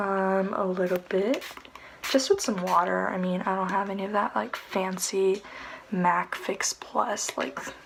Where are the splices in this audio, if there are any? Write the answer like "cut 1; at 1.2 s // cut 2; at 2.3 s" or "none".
none

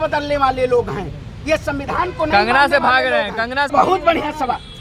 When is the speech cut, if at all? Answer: cut 1; at 3.7 s

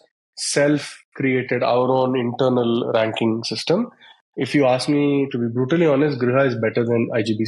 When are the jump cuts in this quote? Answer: none

